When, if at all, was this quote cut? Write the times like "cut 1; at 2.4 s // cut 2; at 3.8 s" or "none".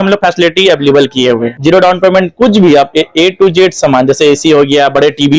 cut 1; at 1.5 s